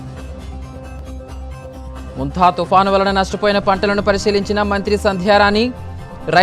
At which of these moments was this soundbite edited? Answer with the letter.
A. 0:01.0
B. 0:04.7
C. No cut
A